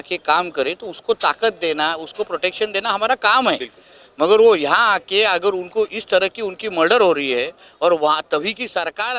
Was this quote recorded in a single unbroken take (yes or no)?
yes